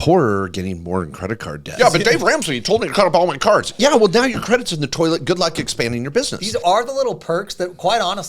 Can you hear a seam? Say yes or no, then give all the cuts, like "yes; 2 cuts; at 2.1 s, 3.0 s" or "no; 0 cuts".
yes; 2 cuts; at 1.7 s, 6.4 s